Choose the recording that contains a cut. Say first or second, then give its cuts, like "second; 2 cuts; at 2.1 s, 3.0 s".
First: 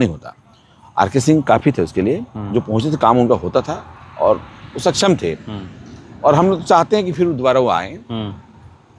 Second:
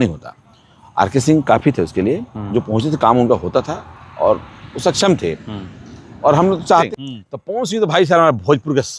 second; 1 cut; at 6.9 s